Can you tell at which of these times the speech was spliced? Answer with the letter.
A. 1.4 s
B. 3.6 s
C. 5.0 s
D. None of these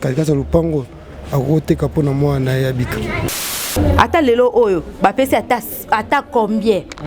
B